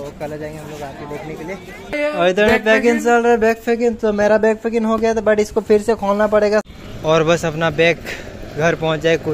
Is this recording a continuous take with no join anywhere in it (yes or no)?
no